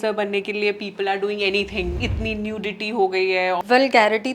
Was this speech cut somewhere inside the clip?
yes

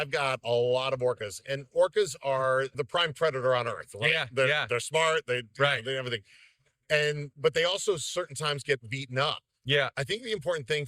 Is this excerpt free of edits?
no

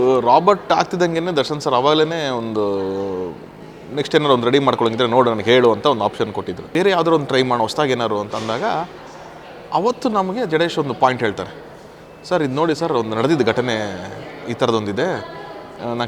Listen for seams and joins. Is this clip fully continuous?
no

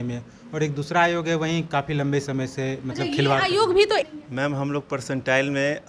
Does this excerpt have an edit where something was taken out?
yes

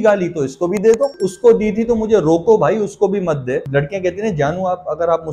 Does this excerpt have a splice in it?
yes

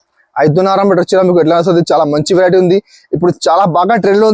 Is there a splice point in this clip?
no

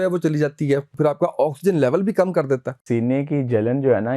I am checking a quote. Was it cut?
yes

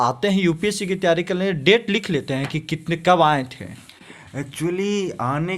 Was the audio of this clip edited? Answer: no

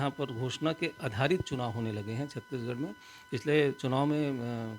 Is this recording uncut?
yes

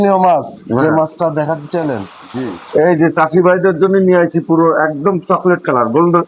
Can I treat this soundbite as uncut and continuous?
no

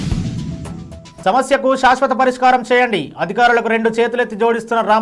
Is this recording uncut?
no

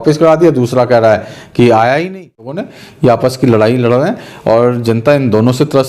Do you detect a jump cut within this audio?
yes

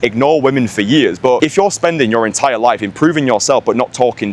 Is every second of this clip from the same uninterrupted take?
no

